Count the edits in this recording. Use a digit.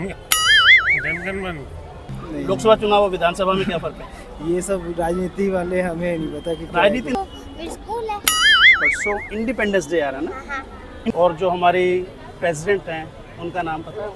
3